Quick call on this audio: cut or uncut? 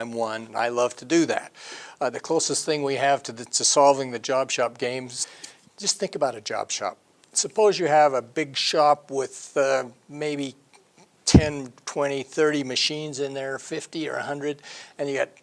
uncut